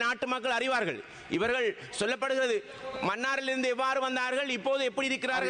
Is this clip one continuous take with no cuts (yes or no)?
yes